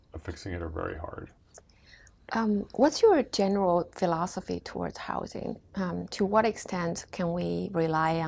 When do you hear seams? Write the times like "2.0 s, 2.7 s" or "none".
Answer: none